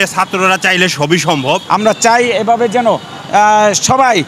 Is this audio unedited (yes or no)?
no